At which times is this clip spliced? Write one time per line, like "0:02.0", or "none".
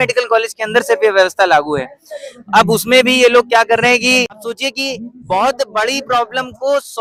none